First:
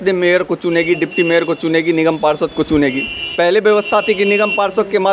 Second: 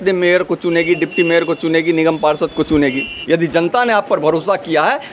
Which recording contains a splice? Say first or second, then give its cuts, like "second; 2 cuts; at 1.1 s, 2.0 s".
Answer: second; 1 cut; at 3.1 s